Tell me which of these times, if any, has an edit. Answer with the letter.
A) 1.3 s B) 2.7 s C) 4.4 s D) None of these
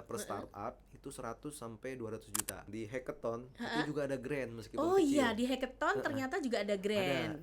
B